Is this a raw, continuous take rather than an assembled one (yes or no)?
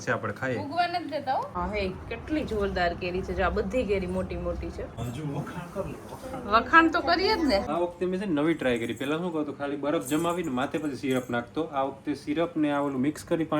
no